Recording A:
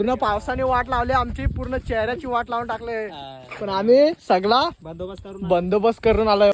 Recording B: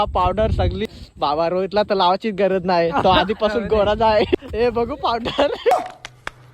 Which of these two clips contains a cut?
B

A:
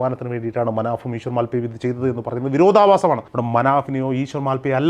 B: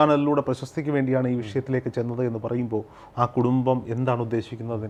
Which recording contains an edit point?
A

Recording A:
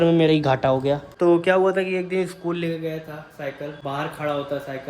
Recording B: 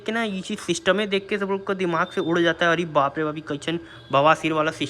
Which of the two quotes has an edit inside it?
A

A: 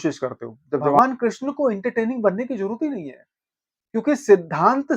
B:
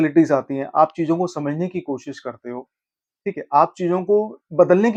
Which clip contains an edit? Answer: A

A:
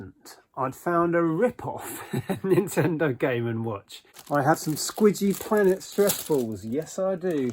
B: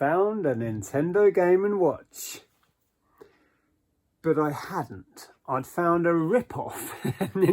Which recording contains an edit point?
A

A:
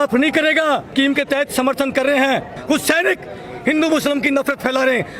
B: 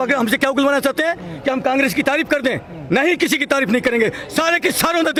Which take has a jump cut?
A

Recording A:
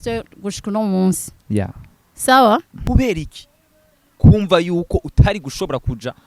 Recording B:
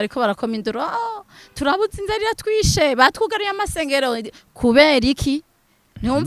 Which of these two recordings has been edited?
A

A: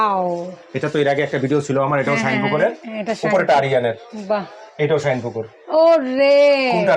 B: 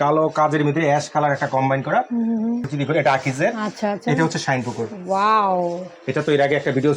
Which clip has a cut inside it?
B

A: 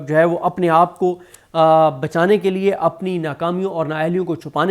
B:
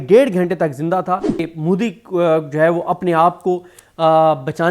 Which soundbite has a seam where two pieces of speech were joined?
B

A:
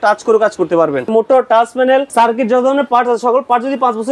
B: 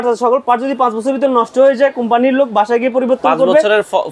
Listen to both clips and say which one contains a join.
A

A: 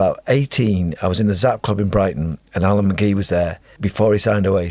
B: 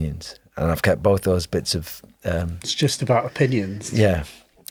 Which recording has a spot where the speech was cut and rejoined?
A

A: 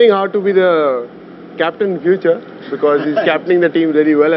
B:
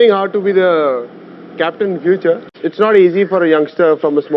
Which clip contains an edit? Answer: B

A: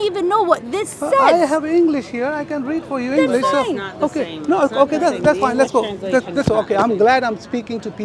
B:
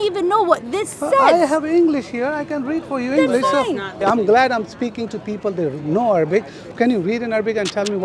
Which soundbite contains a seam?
B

